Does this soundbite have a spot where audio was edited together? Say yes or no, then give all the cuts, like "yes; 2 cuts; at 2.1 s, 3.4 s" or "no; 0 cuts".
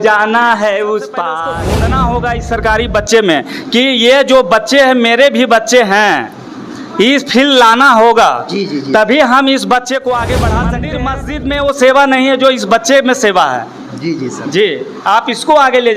yes; 2 cuts; at 1.5 s, 10.9 s